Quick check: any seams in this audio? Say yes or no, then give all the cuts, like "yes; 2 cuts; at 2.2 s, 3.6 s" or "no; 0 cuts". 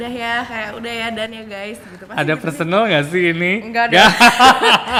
no; 0 cuts